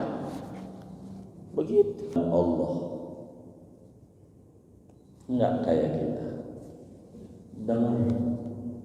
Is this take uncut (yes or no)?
no